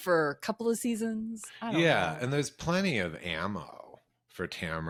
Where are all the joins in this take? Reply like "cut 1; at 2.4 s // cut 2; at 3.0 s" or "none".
none